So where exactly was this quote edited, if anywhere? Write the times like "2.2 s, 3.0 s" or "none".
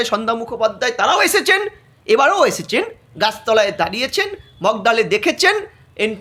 none